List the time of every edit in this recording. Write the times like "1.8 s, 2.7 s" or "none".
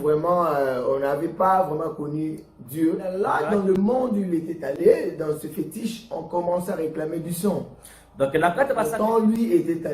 3.2 s, 8.9 s